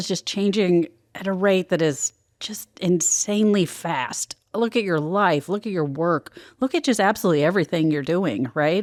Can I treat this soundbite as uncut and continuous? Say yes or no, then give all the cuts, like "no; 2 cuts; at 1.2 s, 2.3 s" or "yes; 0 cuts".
yes; 0 cuts